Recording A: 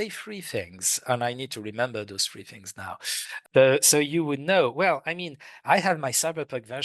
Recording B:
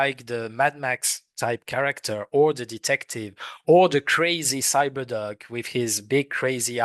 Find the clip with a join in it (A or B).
A